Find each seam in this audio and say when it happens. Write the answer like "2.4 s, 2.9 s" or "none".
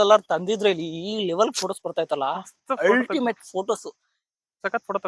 none

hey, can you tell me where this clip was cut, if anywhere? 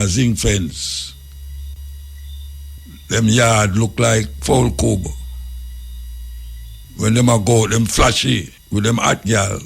2.8 s, 6.8 s, 8.6 s

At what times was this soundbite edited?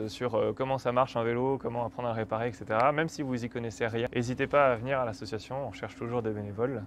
4.1 s

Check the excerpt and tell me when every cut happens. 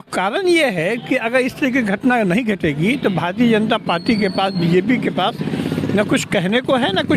none

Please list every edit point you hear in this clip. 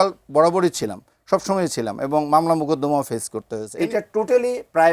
3.6 s

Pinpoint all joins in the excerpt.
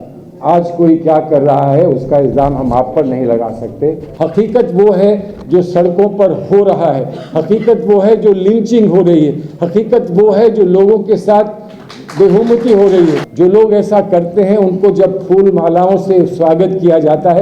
4.1 s, 13.3 s

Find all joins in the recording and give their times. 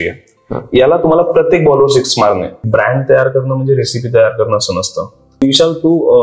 2.7 s, 5.4 s

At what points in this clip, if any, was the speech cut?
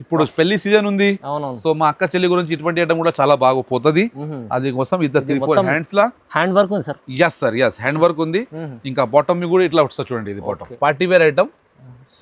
10.7 s

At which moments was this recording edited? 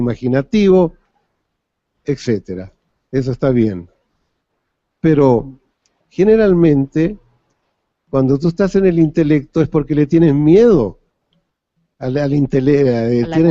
10.8 s

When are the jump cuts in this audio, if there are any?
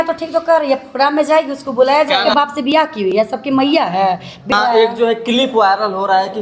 2.3 s, 4.5 s

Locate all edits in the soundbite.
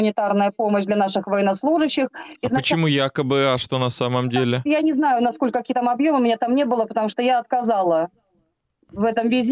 none

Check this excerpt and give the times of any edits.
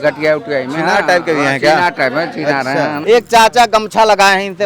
3.0 s

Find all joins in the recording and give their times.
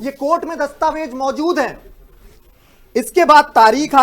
none

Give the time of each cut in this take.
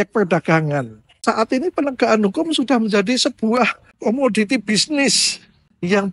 1.2 s

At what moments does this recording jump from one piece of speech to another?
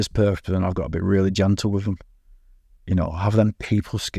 none

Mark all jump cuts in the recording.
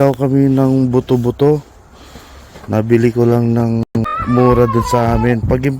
3.8 s

